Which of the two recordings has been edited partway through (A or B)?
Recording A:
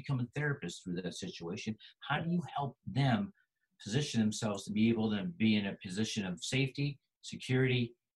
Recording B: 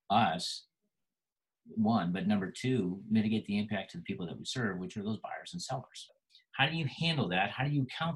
B